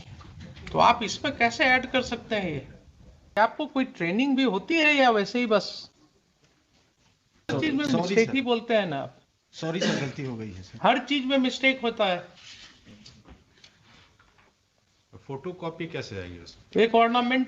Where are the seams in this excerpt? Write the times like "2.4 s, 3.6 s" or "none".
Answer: 3.3 s, 7.5 s